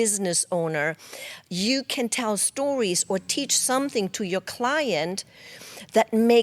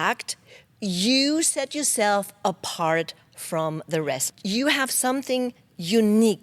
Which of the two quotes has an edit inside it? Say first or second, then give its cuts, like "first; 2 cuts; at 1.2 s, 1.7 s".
second; 1 cut; at 4.2 s